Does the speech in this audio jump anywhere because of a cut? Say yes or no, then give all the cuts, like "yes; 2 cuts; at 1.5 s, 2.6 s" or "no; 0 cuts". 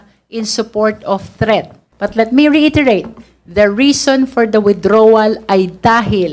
yes; 1 cut; at 1.8 s